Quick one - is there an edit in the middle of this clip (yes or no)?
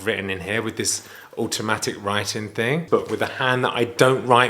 yes